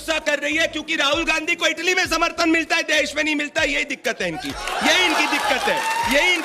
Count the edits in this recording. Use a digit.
0